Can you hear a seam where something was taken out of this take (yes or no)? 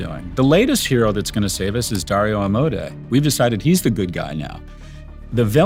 no